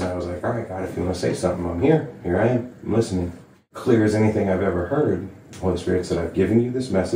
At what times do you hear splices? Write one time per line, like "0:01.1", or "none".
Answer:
0:03.7

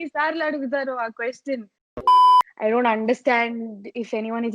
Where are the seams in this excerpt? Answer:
0:01.8
0:02.5

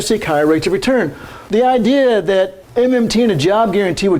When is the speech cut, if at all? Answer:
0:01.3
0:02.6

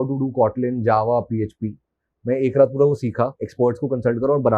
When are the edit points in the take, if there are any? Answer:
0:03.4

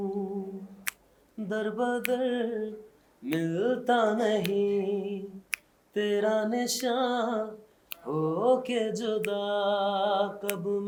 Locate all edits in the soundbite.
none

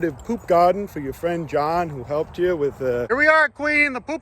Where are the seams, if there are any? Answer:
none

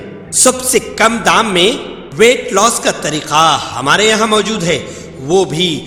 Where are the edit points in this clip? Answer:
none

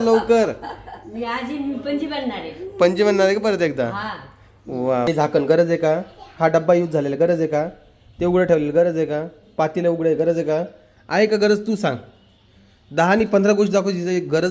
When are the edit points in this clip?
0:05.1

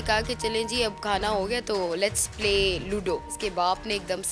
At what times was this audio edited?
0:03.4

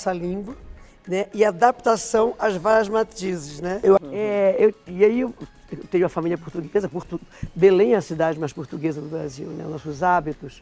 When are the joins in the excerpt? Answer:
0:04.3

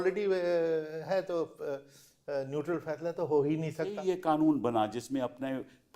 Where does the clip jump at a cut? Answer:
0:04.0

